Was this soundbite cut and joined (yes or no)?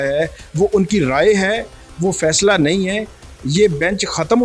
no